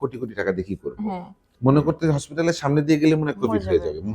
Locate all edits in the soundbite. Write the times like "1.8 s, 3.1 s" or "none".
1.5 s